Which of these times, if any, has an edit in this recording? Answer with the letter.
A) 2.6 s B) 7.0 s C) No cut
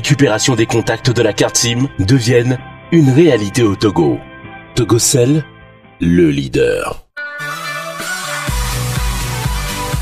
B